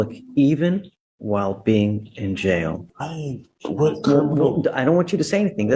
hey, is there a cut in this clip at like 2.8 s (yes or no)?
yes